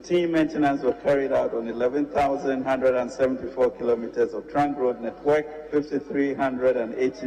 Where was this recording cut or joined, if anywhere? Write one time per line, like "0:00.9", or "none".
0:05.6